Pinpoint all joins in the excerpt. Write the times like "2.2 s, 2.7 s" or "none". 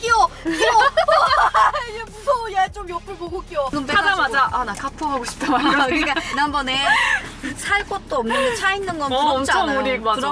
3.7 s, 6.3 s